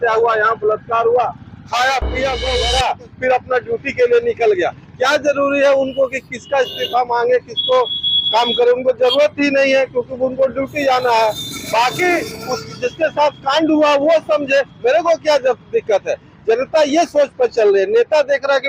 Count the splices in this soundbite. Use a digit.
1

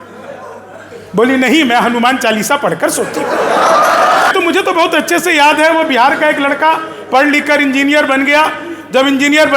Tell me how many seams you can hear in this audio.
1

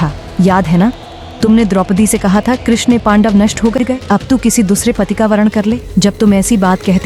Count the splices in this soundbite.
1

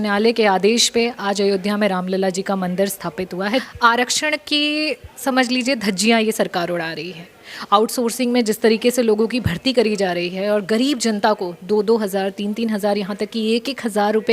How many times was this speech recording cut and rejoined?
1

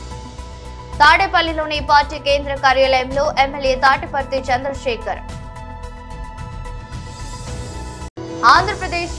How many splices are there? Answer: 1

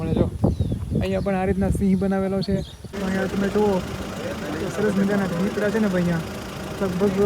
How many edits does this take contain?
1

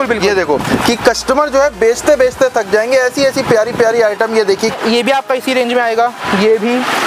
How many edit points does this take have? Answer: 1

